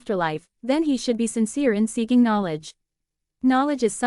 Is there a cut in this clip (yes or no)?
no